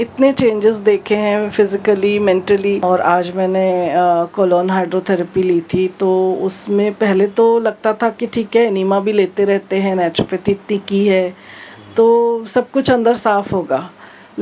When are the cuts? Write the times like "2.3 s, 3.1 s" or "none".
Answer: 2.8 s